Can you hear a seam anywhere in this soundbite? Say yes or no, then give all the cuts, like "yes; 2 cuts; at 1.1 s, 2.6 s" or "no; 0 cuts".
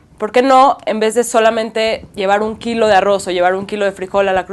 no; 0 cuts